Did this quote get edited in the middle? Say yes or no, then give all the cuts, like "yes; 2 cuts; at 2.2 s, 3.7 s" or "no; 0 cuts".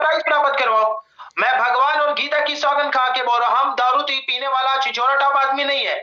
yes; 1 cut; at 1.1 s